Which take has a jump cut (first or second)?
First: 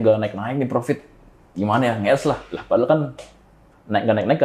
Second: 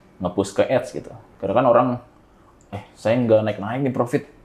second